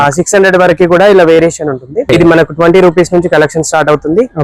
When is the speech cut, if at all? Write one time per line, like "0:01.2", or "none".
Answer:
0:02.0